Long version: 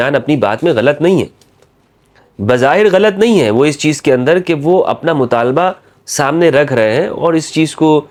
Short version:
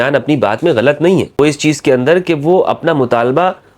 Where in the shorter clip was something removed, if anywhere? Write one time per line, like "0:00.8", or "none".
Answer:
0:01.4